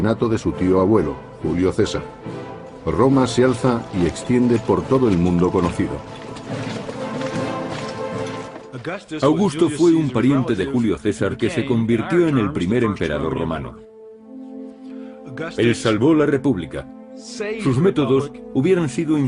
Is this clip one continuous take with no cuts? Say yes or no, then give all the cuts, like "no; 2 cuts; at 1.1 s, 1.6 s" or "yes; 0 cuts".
no; 1 cut; at 12.9 s